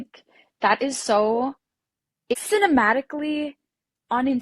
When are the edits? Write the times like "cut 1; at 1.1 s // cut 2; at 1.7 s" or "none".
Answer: cut 1; at 2.3 s

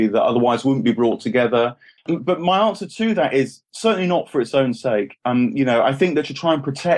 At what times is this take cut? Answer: cut 1; at 2.0 s

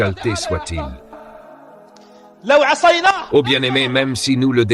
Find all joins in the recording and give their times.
none

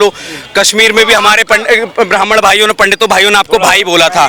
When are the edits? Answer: none

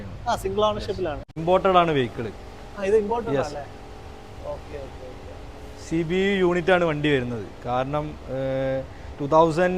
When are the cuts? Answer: cut 1; at 1.3 s

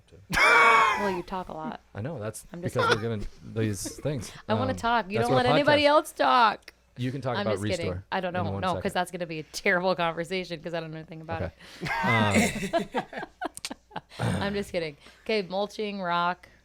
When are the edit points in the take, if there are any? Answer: none

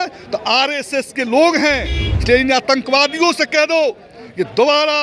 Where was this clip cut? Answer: cut 1; at 2.1 s

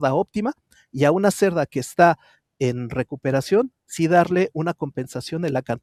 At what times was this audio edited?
none

